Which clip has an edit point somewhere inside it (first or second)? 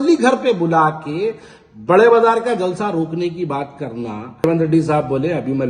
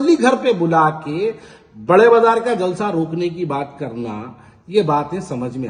first